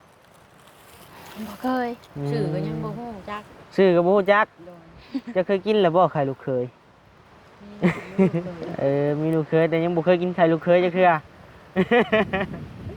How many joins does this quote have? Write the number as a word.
one